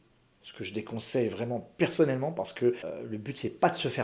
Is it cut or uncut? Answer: cut